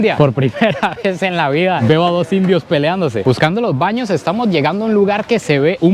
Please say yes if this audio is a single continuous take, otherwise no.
no